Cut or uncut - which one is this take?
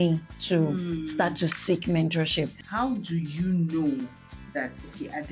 cut